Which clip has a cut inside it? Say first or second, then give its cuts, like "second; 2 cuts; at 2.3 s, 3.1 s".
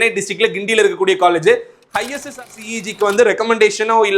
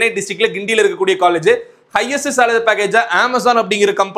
first; 1 cut; at 2.3 s